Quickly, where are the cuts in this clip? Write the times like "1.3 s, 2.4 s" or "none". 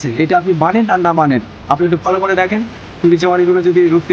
3.0 s